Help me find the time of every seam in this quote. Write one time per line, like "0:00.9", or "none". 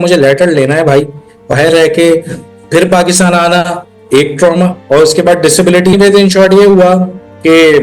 0:01.5
0:05.9